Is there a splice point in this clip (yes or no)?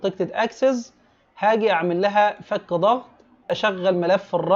yes